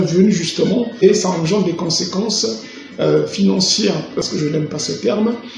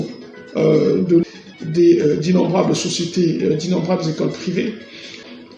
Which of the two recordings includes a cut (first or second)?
first